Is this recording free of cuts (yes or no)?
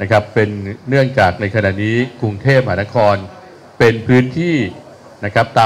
yes